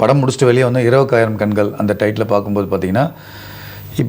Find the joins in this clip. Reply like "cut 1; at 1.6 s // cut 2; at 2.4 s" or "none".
none

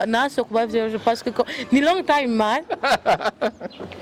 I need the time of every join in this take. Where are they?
none

